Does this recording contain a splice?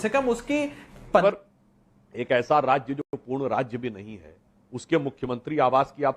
yes; 1 cut; at 1.2 s

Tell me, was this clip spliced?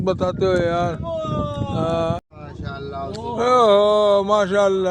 yes; 1 cut; at 2.3 s

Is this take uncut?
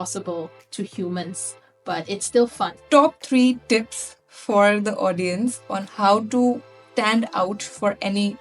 no; 2 cuts; at 2.8 s, 6.7 s

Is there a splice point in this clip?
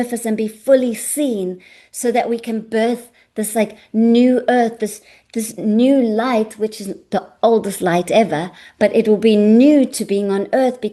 no; 0 cuts

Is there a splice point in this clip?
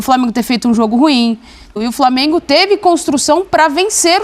yes; 1 cut; at 1.7 s

